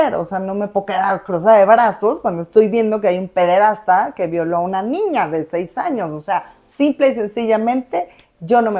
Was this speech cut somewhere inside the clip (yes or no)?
no